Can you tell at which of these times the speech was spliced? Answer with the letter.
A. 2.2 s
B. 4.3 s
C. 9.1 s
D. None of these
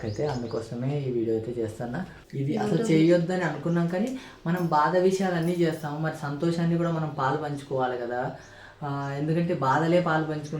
A